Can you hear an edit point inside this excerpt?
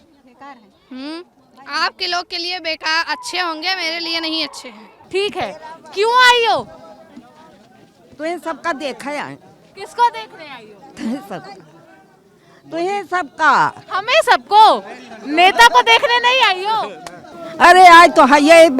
yes; 2 cuts; at 4.9 s, 17.4 s

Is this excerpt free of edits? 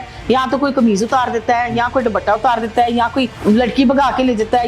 no; 1 cut; at 3.4 s

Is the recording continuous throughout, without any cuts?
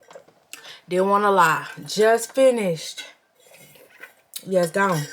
yes; 0 cuts

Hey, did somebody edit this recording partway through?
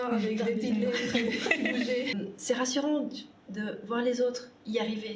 yes; 1 cut; at 2.1 s

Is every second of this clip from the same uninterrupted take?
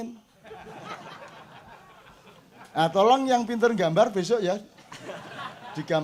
yes; 0 cuts

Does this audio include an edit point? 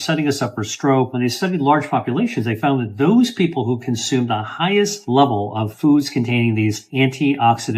yes; 3 cuts; at 1.1 s, 5.0 s, 6.8 s

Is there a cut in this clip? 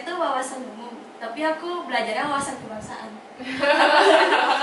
no; 0 cuts

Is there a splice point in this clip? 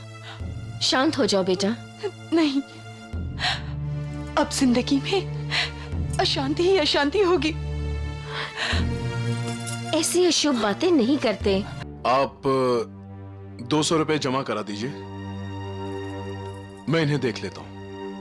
yes; 1 cut; at 11.8 s

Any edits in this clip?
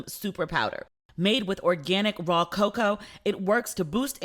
no; 0 cuts

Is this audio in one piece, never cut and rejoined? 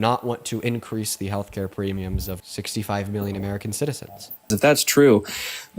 no; 2 cuts; at 2.4 s, 4.5 s

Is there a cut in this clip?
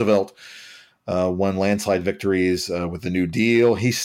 no; 0 cuts

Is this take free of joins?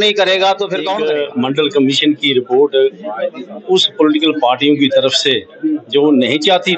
no; 1 cut; at 0.9 s

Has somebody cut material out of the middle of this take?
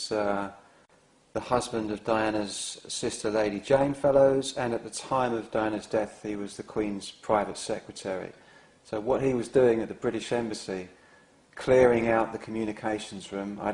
no; 0 cuts

